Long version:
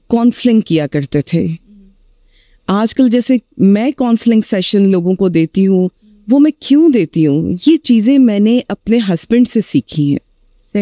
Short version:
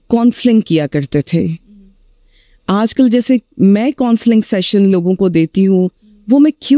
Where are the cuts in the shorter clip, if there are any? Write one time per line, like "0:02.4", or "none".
none